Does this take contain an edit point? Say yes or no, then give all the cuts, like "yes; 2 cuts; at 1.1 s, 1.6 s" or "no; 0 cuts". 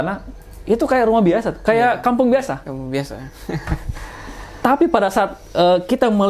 no; 0 cuts